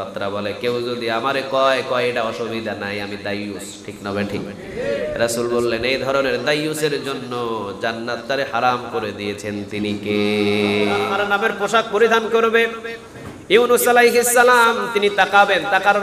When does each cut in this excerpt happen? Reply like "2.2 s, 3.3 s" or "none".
11.2 s